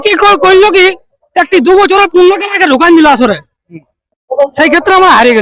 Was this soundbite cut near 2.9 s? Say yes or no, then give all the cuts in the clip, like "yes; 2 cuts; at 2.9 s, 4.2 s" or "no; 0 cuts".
no; 0 cuts